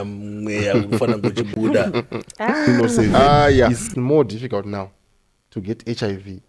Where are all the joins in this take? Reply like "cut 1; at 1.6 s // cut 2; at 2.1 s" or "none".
cut 1; at 3.7 s